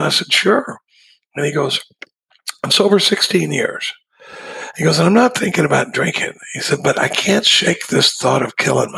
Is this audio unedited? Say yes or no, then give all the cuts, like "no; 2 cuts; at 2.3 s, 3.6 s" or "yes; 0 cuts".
yes; 0 cuts